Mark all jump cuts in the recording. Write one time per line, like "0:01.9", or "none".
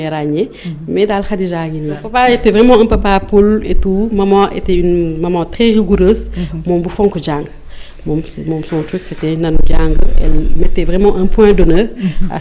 0:02.1